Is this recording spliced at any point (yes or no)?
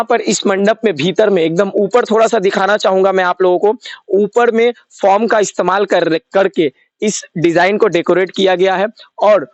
no